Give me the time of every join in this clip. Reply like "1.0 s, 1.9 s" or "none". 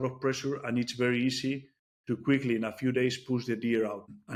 none